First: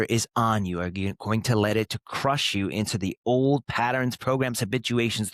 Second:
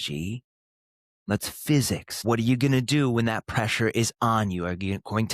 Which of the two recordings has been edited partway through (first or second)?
second